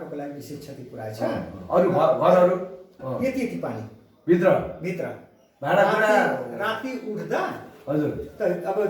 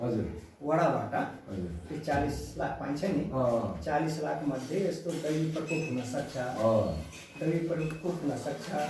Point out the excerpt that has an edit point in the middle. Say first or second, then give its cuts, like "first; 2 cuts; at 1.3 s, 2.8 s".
first; 1 cut; at 3.0 s